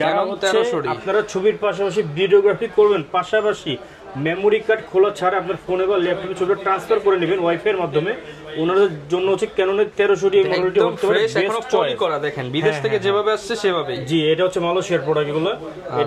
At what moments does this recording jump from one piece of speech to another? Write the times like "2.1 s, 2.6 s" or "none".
none